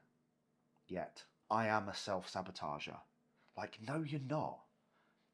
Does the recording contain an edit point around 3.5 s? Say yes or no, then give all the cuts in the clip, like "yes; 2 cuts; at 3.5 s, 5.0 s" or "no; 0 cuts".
no; 1 cut; at 1.3 s